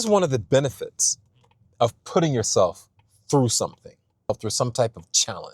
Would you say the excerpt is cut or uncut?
cut